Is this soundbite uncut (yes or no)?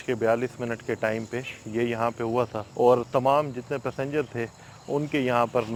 yes